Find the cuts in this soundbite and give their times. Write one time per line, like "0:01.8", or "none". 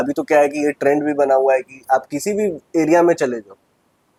none